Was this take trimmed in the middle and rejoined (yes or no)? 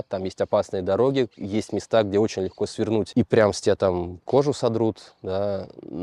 no